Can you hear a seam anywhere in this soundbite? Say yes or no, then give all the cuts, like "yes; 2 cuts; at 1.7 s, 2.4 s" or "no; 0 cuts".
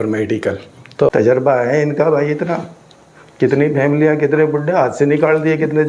yes; 1 cut; at 1.1 s